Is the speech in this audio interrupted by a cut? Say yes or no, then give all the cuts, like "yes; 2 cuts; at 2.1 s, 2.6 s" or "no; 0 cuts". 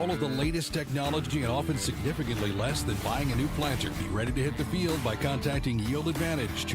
yes; 1 cut; at 1.3 s